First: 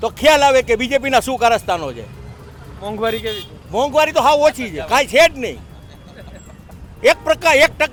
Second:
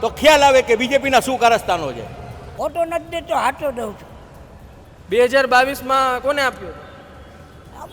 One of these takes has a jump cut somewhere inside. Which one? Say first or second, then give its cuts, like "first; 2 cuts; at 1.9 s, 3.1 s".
second; 1 cut; at 2.4 s